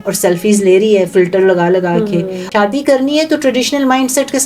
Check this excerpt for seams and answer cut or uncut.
cut